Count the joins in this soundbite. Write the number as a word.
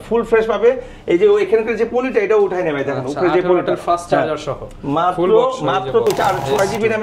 one